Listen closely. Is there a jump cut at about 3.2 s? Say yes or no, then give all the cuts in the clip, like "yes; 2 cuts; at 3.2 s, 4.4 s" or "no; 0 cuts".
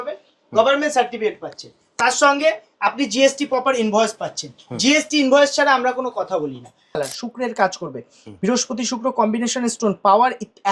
no; 1 cut; at 7.0 s